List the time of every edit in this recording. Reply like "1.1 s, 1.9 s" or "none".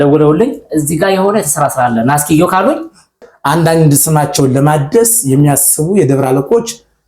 3.3 s